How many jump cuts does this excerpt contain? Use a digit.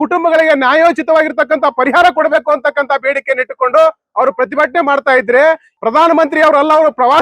1